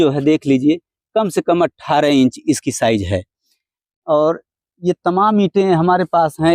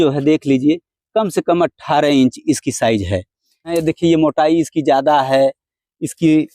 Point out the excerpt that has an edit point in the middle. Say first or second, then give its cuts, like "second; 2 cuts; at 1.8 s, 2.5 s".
second; 1 cut; at 3.7 s